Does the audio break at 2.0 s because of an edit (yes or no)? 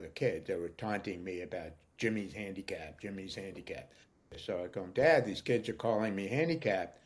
no